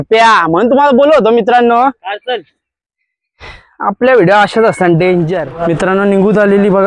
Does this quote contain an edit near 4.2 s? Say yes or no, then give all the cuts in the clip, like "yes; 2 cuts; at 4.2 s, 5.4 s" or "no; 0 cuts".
no; 1 cut; at 5.4 s